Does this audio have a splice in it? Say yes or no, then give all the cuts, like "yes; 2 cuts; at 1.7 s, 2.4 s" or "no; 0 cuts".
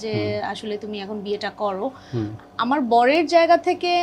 no; 0 cuts